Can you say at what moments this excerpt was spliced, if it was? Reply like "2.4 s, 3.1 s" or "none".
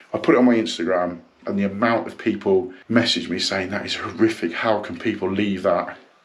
2.8 s

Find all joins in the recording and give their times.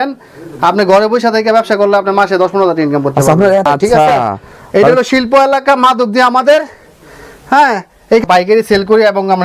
3.6 s, 8.2 s

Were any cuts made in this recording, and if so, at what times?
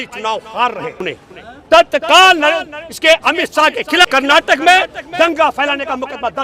1.0 s, 4.1 s

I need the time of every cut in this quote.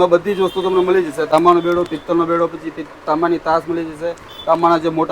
1.3 s

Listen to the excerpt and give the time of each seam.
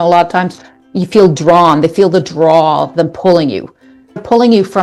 none

